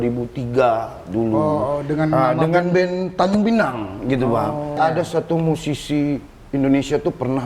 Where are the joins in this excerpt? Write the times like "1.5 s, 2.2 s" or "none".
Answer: 4.8 s